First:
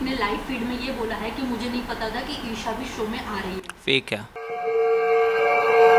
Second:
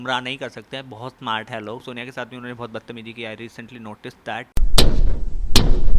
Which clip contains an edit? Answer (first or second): second